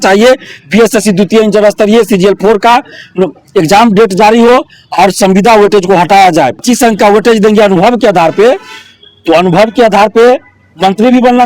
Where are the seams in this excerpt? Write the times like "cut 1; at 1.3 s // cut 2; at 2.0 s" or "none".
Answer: cut 1; at 6.6 s